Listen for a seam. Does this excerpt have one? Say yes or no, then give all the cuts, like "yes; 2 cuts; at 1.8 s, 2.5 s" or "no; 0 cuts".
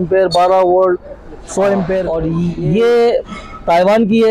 yes; 1 cut; at 2.1 s